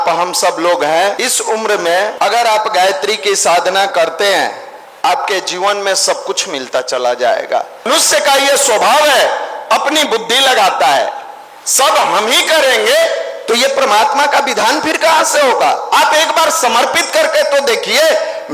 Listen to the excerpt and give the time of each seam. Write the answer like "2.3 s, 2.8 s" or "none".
1.2 s, 2.1 s, 7.9 s